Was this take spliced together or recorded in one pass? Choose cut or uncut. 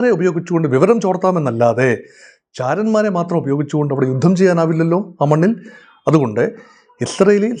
uncut